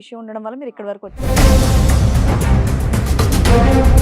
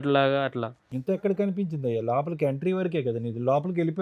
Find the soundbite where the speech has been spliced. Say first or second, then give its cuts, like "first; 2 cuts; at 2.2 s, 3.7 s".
first; 1 cut; at 1.2 s